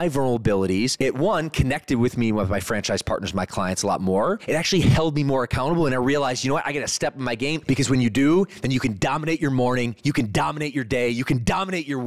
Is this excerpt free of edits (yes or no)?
no